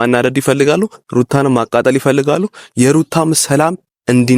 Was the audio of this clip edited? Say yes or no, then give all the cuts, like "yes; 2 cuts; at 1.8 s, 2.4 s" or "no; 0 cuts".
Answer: no; 0 cuts